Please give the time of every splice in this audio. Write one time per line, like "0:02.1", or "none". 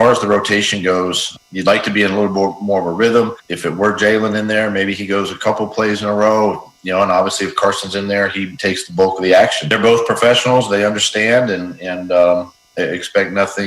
0:10.7